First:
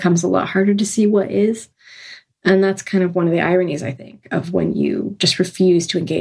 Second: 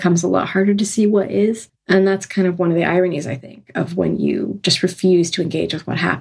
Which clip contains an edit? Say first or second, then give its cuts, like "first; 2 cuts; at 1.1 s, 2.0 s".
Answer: second; 1 cut; at 1.7 s